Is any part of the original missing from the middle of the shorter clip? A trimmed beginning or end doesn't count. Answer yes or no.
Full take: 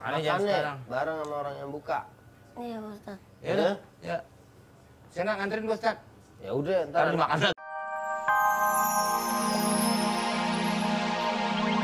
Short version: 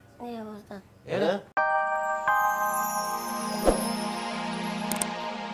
yes